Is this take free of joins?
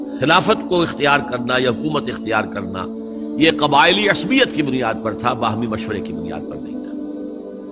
yes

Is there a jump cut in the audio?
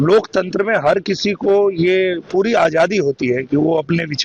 no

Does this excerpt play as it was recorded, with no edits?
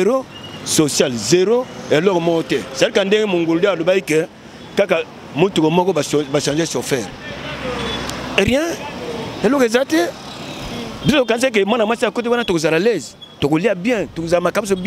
yes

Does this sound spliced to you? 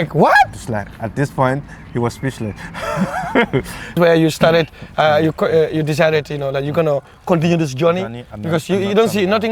yes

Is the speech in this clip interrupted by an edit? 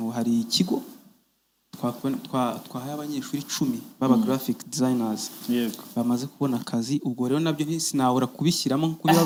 no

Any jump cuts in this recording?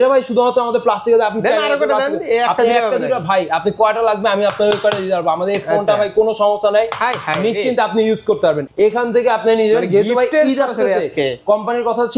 yes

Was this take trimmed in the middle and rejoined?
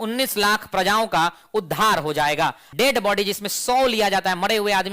yes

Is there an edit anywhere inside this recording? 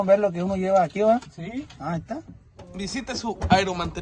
yes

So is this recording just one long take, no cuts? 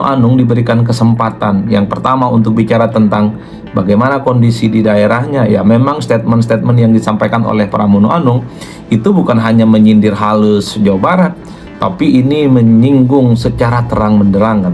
yes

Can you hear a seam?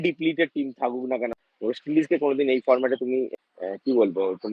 yes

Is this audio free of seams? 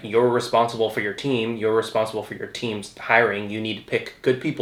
yes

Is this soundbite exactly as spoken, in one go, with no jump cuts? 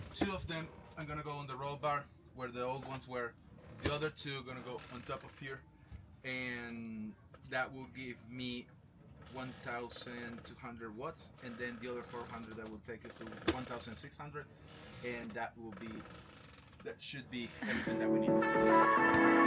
yes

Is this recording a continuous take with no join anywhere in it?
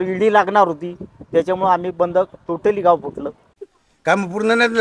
no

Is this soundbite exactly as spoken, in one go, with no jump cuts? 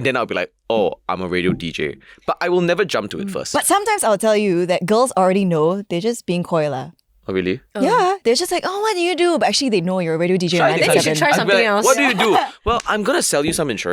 yes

